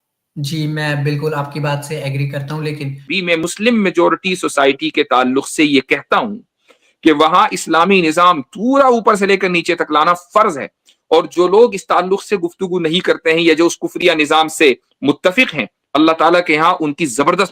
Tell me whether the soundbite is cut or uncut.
cut